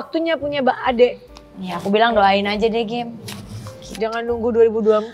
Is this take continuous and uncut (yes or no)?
yes